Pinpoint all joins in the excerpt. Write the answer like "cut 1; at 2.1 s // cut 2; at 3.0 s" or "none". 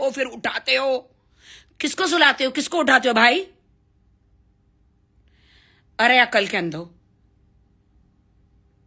none